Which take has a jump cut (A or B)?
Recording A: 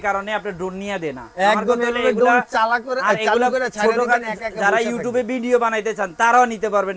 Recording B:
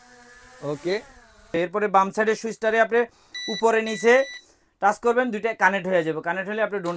B